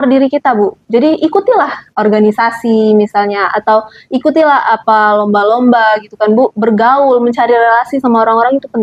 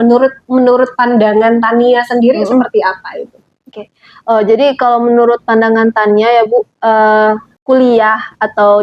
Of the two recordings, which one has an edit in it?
second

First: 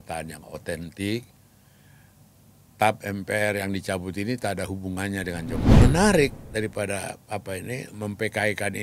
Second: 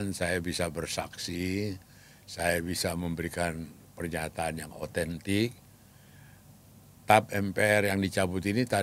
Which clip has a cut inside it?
first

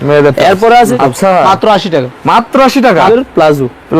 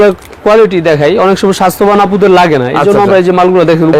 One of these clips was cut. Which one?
first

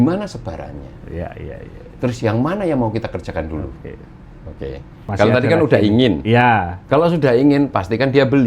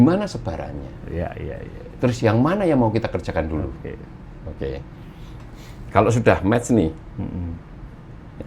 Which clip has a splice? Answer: first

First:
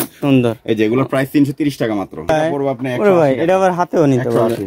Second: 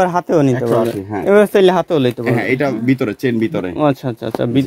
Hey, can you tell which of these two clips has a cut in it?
first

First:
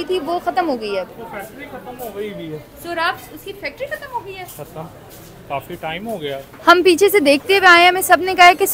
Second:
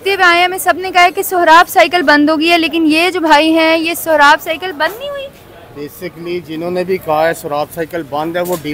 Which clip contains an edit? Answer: first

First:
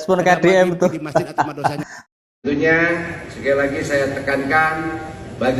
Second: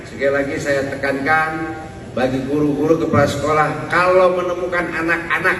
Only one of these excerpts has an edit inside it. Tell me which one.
first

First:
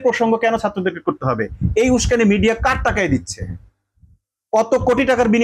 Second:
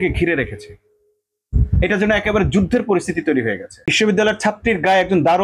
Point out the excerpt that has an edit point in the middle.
second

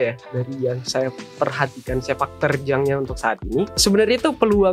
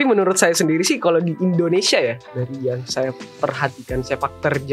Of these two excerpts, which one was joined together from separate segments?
first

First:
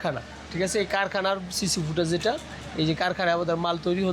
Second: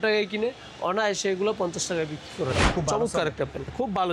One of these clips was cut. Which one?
second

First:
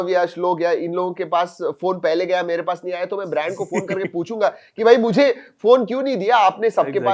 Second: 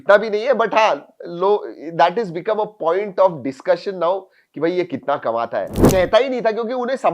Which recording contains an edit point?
second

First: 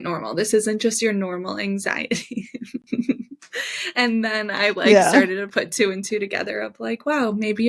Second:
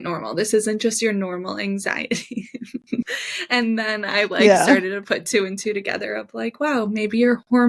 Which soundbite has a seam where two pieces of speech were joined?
second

